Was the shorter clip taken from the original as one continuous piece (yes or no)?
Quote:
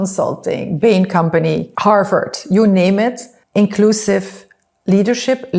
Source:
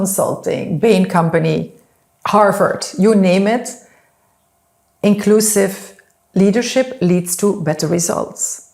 no